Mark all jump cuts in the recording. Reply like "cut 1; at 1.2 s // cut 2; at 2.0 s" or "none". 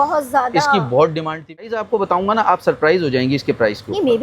cut 1; at 1.6 s